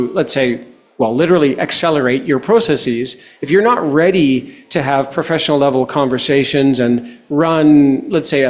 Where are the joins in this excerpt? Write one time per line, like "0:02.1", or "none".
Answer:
none